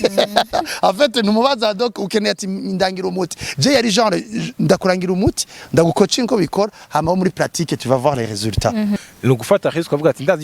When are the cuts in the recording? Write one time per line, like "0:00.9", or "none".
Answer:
0:09.0